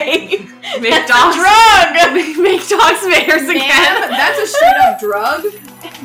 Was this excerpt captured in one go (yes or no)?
yes